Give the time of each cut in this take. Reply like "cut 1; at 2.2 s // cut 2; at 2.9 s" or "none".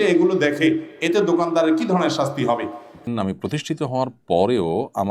cut 1; at 3.0 s